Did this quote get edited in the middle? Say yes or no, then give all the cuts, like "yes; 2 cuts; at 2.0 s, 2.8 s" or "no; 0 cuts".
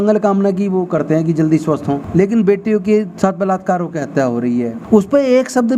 yes; 2 cuts; at 2.0 s, 4.8 s